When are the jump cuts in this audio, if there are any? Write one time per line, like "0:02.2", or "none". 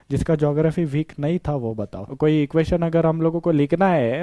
0:02.0